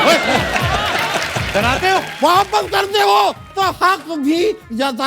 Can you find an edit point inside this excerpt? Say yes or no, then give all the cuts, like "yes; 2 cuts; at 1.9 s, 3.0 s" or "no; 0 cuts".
yes; 1 cut; at 2.1 s